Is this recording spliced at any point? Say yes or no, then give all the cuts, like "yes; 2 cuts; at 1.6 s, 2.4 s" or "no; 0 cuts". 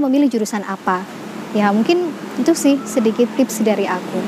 yes; 1 cut; at 1.2 s